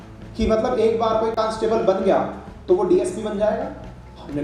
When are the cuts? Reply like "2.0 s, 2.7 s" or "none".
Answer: none